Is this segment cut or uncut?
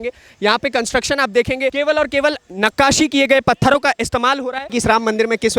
cut